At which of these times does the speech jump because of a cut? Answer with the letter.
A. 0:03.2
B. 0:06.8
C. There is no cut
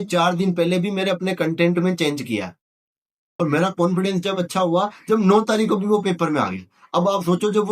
A